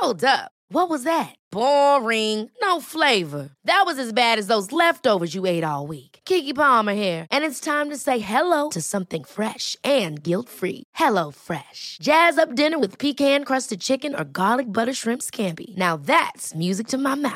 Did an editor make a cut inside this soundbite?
no; 0 cuts

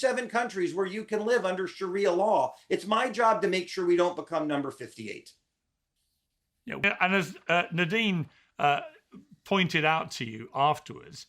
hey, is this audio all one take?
no; 1 cut; at 6.8 s

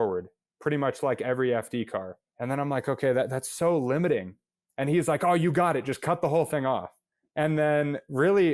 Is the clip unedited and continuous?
no; 1 cut; at 7.2 s

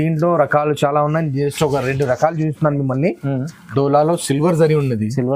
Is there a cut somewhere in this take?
yes; 1 cut; at 3.6 s

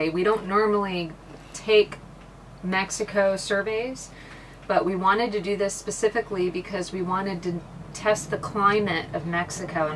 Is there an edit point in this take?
no; 0 cuts

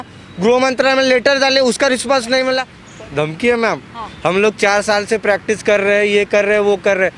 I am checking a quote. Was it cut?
yes; 1 cut; at 2.8 s

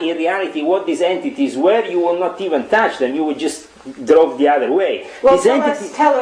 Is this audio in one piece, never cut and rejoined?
yes; 0 cuts

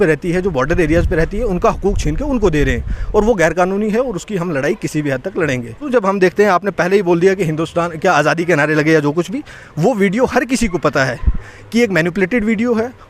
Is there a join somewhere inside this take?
yes; 1 cut; at 5.9 s

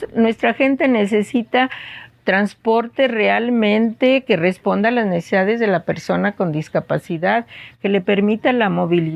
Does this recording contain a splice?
no; 0 cuts

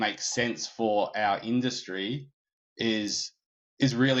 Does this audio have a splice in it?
no; 0 cuts

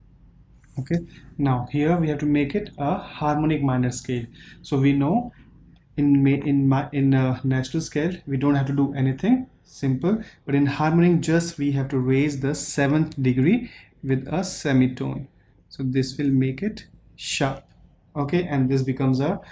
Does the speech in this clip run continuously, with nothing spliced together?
yes; 0 cuts

